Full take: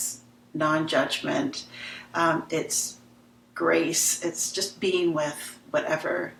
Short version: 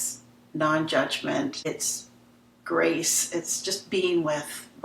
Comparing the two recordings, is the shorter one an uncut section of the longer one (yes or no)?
no